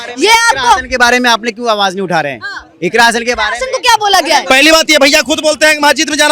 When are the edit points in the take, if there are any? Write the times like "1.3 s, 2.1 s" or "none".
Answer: 4.4 s

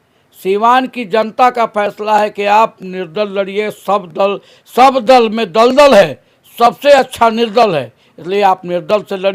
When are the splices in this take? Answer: none

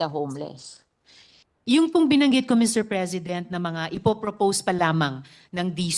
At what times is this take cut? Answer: none

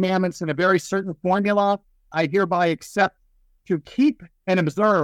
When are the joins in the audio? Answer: 2.1 s

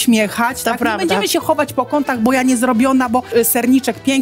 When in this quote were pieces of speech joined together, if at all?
3.3 s

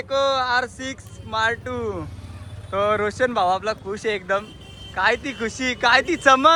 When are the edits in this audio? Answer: none

